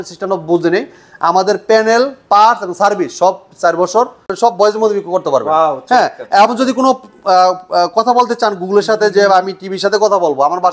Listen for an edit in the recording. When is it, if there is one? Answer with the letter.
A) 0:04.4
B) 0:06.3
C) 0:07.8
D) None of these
A